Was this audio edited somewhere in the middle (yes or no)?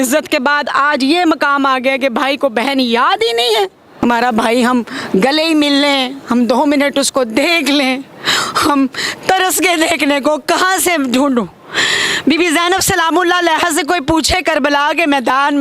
yes